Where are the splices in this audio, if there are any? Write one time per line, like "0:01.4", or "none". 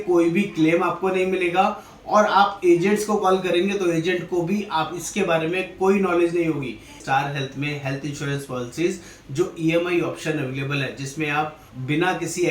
0:07.0